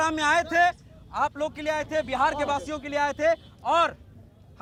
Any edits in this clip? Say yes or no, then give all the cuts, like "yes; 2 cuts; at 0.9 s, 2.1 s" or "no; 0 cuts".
no; 0 cuts